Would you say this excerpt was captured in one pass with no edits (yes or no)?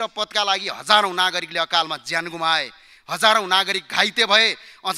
yes